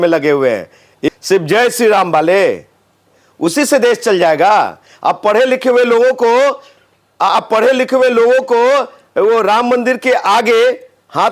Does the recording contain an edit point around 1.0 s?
yes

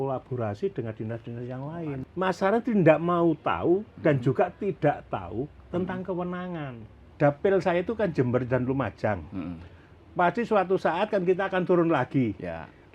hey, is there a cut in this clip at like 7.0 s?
yes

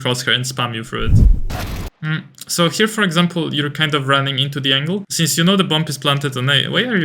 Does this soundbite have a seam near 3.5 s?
no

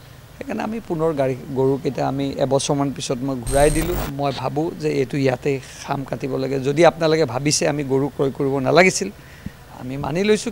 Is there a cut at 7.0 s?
no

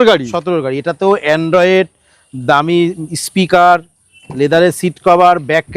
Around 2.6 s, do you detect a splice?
no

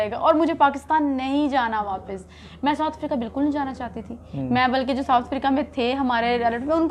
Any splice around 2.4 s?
no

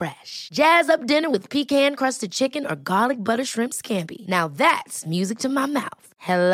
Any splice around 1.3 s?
no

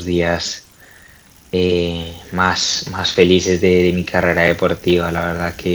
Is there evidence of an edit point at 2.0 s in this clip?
no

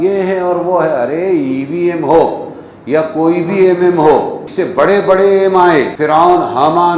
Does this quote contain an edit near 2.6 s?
no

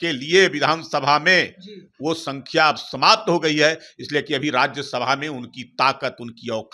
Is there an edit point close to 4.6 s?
no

